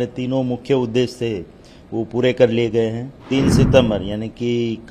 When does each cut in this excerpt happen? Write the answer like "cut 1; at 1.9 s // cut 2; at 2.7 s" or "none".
cut 1; at 3.1 s